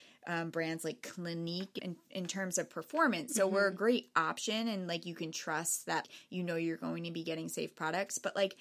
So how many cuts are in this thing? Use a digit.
2